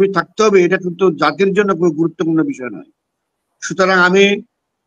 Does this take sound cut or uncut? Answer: uncut